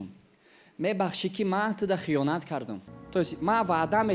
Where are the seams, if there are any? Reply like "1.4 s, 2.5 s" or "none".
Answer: 2.8 s